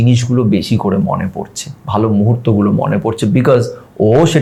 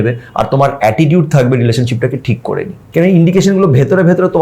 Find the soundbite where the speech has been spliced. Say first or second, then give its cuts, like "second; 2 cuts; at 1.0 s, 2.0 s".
second; 1 cut; at 2.8 s